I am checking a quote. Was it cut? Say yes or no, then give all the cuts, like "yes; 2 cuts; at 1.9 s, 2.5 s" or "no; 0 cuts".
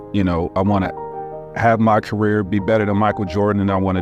no; 0 cuts